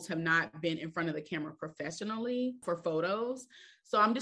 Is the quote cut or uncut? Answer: cut